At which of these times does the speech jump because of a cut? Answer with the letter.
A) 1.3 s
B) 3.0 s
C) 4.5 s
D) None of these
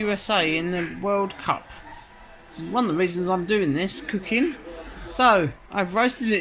D